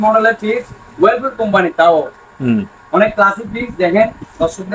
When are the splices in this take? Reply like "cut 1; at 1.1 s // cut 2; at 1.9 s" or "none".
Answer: none